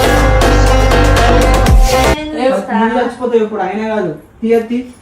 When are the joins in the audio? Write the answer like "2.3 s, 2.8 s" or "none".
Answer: 2.1 s